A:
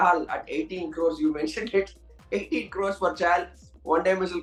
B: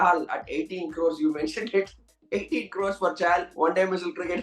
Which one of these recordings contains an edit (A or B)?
B